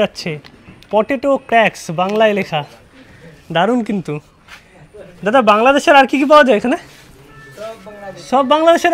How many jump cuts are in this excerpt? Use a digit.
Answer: 0